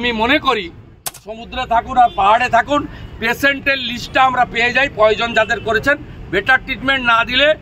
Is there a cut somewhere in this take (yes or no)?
yes